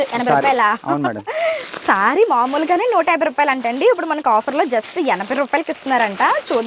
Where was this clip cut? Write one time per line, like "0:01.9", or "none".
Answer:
none